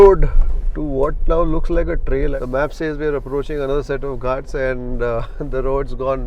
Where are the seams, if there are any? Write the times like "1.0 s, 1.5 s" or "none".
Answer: 2.3 s